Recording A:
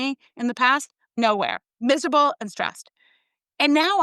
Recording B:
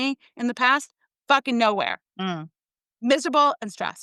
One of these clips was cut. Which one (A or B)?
A